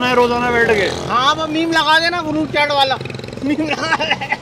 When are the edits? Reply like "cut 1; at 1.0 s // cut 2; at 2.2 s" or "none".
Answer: none